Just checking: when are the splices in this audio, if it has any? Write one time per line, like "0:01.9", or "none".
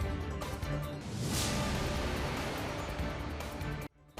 none